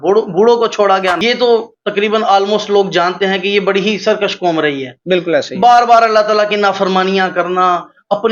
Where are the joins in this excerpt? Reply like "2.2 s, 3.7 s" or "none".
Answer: 1.2 s

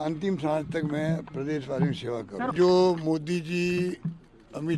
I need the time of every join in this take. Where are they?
2.5 s

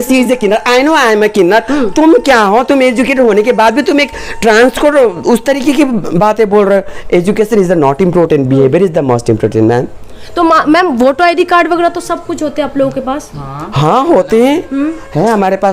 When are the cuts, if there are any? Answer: none

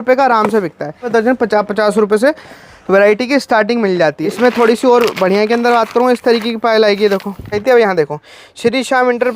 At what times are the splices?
1.1 s, 4.2 s, 7.6 s

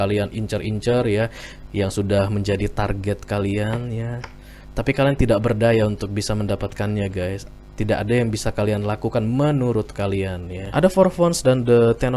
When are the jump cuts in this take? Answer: 10.5 s

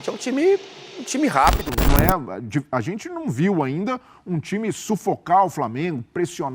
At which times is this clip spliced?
1.7 s

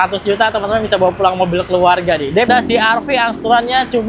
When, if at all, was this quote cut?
2.5 s

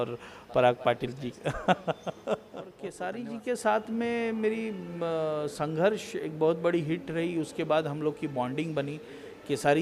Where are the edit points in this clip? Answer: 2.9 s

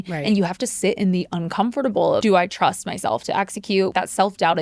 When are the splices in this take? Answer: 2.2 s, 3.9 s

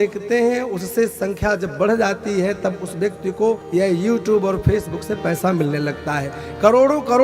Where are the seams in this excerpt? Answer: 3.6 s

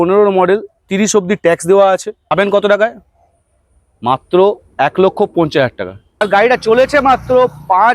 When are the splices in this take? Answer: 2.3 s, 6.2 s

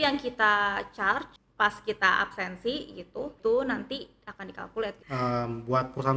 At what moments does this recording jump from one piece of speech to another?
1.4 s, 3.4 s, 5.0 s

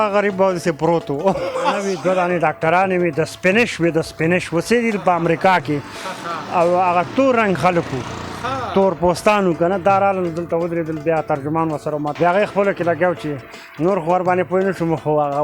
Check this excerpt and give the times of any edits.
1.9 s, 12.1 s

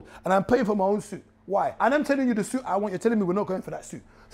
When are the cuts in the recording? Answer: 1.8 s

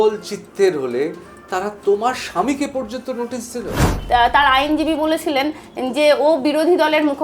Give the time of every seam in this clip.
3.8 s

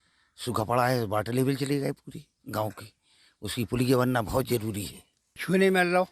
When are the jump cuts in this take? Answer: none

